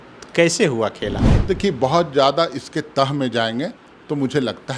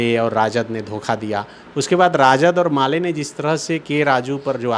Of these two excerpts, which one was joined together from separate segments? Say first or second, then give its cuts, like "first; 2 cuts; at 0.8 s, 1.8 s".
first; 1 cut; at 1.3 s